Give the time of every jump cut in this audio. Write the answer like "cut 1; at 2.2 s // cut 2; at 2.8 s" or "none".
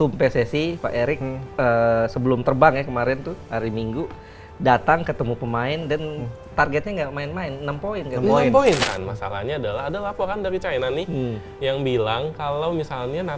cut 1; at 8.8 s